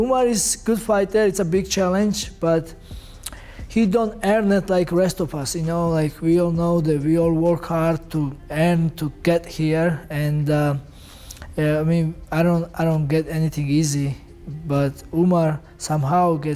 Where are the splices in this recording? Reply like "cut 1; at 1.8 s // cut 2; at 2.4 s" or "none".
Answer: none

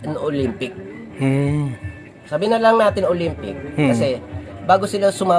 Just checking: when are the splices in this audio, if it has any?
none

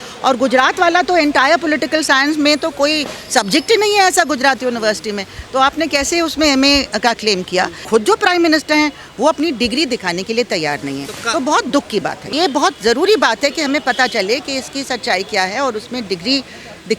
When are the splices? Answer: cut 1; at 7.8 s // cut 2; at 12.2 s

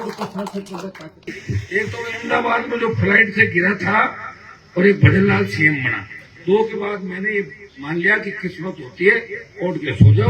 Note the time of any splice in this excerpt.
cut 1; at 1.3 s

